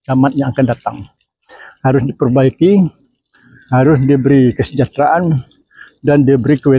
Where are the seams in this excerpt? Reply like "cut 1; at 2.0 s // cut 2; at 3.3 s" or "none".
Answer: none